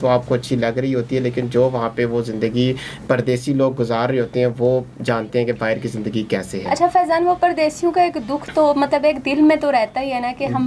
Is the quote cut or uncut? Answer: uncut